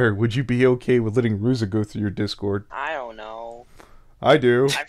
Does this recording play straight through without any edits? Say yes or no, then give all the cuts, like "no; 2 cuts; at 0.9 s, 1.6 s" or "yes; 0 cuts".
no; 1 cut; at 2.7 s